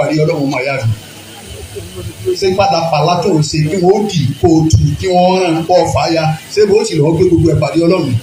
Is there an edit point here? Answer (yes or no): no